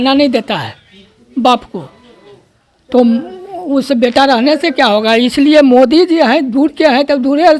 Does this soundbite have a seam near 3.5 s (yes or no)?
no